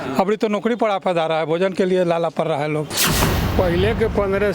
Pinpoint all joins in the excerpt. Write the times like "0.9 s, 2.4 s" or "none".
3.0 s